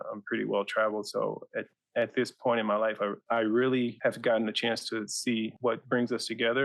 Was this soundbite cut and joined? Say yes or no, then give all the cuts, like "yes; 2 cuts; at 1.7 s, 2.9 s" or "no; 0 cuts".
yes; 3 cuts; at 3.2 s, 4.0 s, 5.5 s